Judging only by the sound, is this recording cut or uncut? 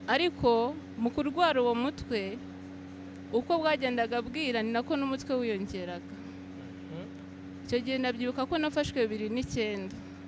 uncut